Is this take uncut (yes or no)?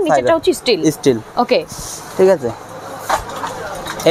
yes